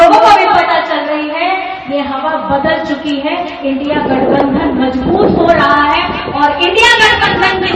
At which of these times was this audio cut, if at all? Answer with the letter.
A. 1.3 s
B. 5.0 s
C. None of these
C